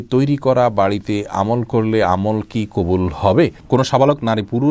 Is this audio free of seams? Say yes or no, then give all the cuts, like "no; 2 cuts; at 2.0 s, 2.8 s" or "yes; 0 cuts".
no; 1 cut; at 3.6 s